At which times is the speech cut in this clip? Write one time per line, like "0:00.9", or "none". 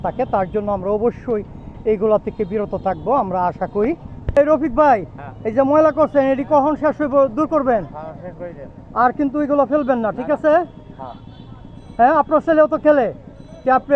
none